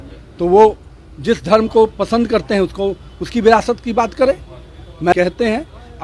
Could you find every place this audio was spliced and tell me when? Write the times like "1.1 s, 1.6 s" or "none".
5.1 s